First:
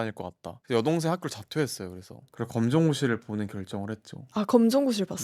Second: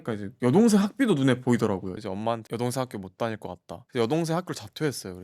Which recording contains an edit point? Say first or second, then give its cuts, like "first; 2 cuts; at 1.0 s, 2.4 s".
second; 1 cut; at 2.0 s